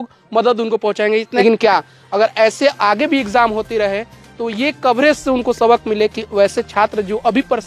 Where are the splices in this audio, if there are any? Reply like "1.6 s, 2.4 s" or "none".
1.3 s